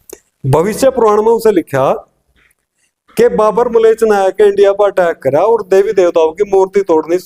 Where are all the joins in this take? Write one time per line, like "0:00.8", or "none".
none

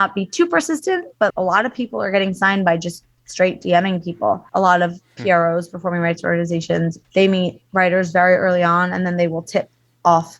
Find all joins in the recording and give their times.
0:01.3
0:04.5
0:07.0

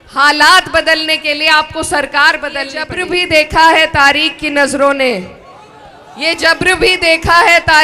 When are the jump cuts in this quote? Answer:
0:03.0

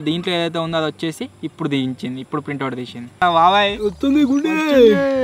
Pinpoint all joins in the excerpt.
0:03.2

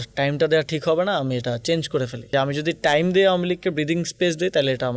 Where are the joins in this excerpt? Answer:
0:02.3

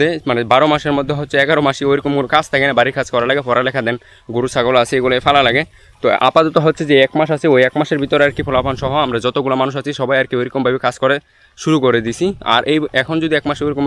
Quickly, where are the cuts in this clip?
none

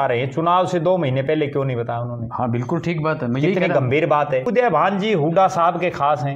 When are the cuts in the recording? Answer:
0:04.5

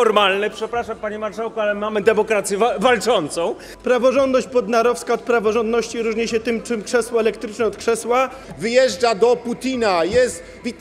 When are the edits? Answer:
0:03.7
0:08.4

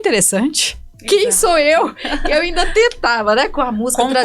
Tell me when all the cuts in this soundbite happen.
none

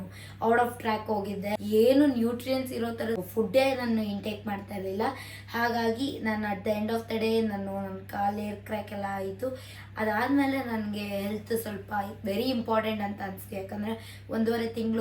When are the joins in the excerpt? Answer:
0:01.6
0:03.2

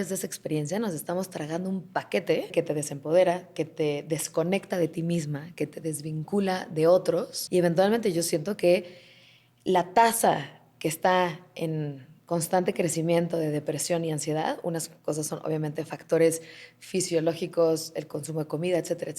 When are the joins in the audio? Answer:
0:02.5
0:07.3

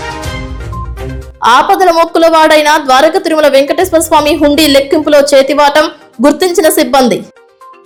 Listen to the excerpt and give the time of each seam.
none

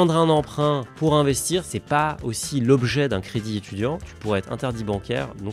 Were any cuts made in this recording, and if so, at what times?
0:01.7
0:04.0

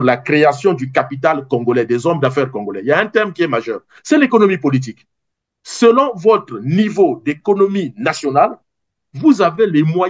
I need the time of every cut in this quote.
none

